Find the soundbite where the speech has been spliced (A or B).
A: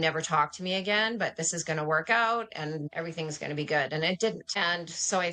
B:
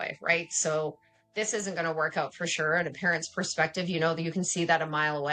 A